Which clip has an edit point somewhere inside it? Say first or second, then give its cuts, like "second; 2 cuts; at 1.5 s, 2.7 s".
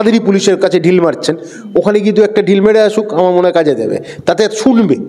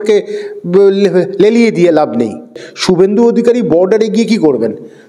second; 1 cut; at 2.5 s